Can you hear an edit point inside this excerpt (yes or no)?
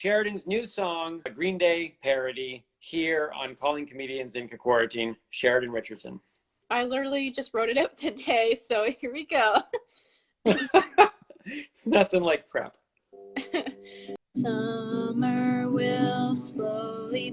yes